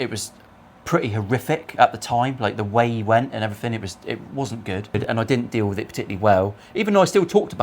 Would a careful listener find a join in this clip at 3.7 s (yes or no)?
no